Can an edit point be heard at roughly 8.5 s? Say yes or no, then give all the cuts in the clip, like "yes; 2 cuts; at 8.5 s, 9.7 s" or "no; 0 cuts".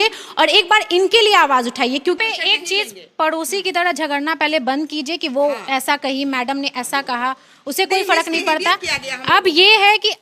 no; 1 cut; at 2.2 s